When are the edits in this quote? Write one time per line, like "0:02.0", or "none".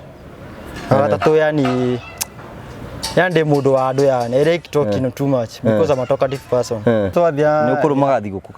0:07.1